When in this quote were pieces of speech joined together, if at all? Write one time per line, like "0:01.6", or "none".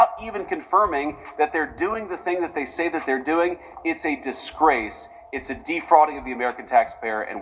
none